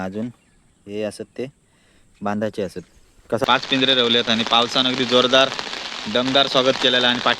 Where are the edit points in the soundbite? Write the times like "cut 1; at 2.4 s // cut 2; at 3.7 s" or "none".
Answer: cut 1; at 3.4 s